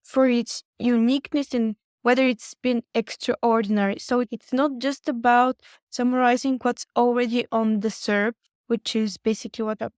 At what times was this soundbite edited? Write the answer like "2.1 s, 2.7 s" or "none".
0.7 s, 4.3 s